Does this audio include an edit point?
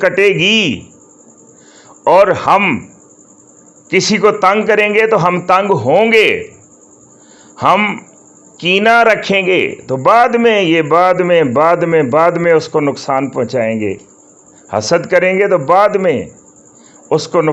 no; 0 cuts

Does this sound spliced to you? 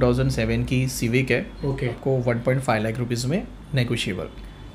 yes; 1 cut; at 2.0 s

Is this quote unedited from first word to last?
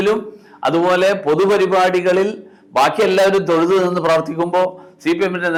yes; 0 cuts

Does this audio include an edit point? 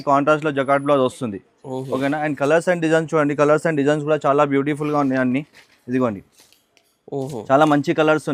no; 0 cuts

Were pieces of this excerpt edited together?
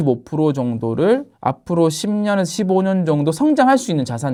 no; 0 cuts

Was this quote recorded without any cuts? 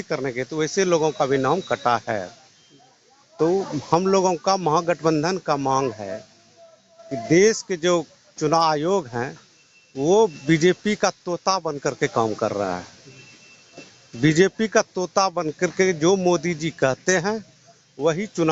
yes; 0 cuts

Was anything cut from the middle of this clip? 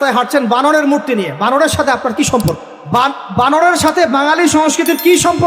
yes; 1 cut; at 2.7 s

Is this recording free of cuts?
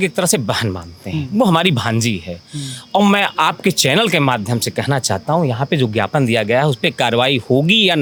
yes; 0 cuts

